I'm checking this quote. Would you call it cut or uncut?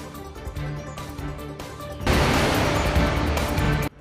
uncut